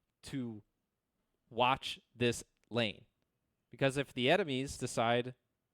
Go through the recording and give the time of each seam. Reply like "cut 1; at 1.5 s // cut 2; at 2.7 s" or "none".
cut 1; at 4.8 s